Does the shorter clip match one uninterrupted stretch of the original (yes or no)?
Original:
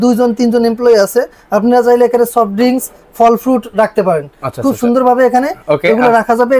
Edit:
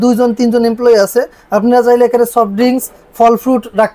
yes